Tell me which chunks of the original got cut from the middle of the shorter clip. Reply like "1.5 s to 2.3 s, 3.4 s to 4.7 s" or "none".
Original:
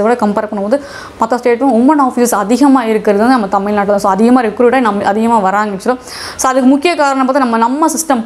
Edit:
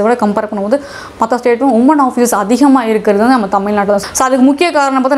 4.0 s to 6.2 s

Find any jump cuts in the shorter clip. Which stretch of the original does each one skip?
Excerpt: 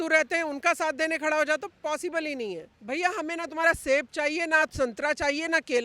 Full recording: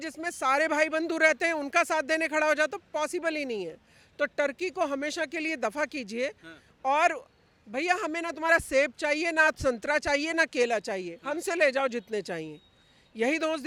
3.8 s to 7.6 s

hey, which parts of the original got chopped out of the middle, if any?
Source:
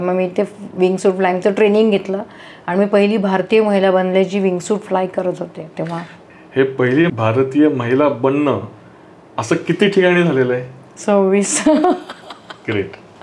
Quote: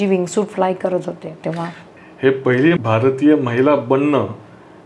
none

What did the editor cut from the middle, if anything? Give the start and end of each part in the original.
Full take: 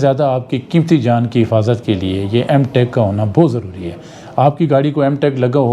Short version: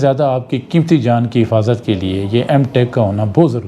none

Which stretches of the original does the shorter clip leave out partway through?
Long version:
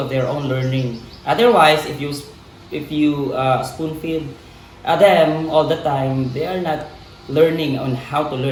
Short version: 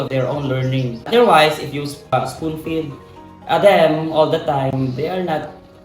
1.1 s to 1.4 s, 2.4 s to 3.5 s

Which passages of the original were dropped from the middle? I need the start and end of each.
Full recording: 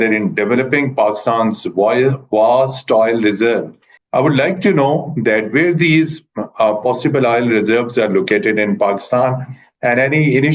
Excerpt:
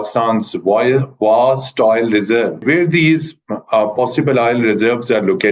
3.7 s to 5.5 s

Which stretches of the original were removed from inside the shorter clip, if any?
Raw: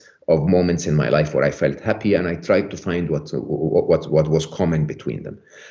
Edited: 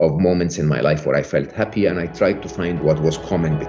3.1 s to 4.1 s

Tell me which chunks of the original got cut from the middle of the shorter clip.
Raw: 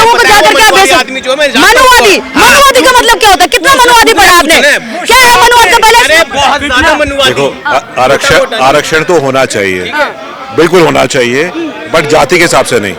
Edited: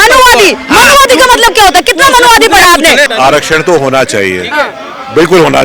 4.8 s to 8.5 s

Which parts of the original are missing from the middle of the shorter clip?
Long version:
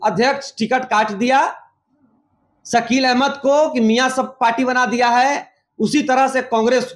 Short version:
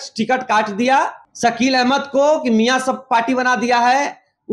1.7 s to 2.5 s

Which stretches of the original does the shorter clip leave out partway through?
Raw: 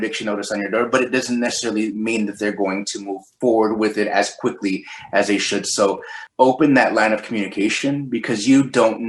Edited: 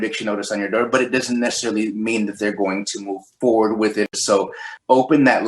4.1 s to 5.6 s

